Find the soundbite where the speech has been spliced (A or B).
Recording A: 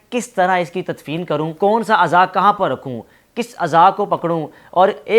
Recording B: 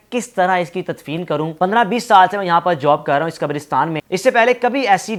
A